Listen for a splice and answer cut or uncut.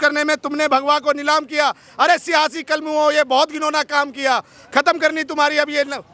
uncut